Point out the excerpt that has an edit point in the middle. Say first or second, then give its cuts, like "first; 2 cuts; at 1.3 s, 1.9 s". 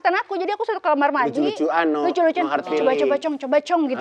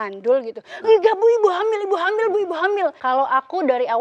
second; 1 cut; at 3.0 s